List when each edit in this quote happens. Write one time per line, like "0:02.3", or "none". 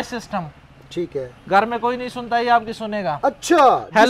none